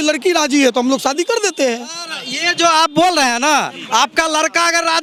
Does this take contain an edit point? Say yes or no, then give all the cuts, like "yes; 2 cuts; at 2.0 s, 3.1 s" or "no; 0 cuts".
no; 0 cuts